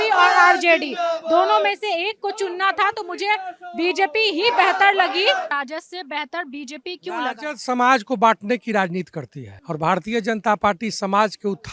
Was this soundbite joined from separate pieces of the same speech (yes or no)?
yes